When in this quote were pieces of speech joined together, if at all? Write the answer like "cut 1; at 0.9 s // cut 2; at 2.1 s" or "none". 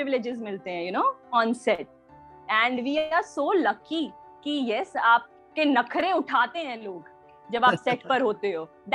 none